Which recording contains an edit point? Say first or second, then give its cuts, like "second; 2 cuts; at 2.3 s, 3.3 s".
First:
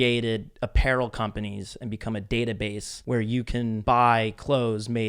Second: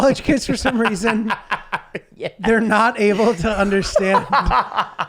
first; 2 cuts; at 2.9 s, 3.8 s